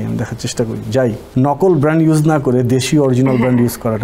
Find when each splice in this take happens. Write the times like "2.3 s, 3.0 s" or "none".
1.2 s

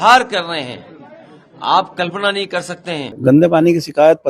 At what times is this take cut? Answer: 3.1 s

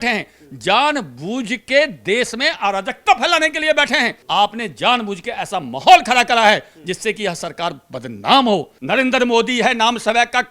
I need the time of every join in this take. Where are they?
4.2 s, 8.7 s

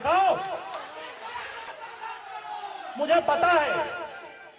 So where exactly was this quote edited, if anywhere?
1.7 s

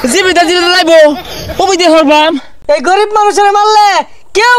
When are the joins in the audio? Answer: 2.5 s

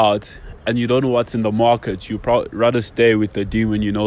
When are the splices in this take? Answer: none

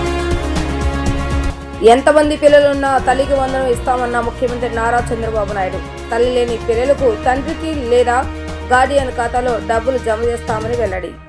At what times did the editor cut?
1.0 s

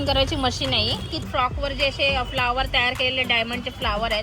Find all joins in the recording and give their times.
1.3 s

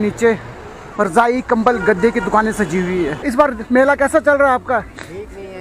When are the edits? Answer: 3.2 s

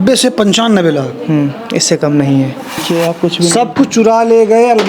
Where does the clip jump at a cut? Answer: 2.8 s

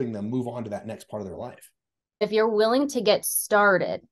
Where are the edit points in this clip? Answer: 2.3 s

